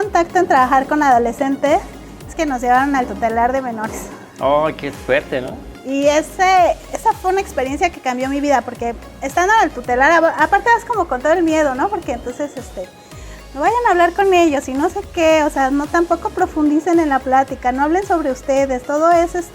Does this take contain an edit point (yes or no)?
no